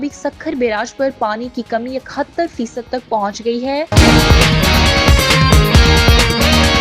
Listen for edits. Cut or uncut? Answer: cut